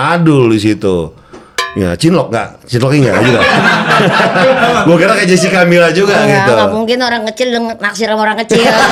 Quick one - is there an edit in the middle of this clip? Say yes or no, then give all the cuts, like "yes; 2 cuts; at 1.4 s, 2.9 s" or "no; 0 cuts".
no; 0 cuts